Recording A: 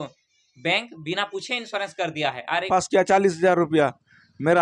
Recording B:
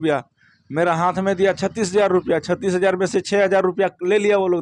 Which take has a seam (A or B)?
A